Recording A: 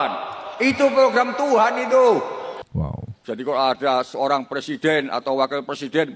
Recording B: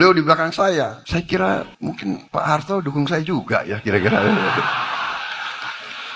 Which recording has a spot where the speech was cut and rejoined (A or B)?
B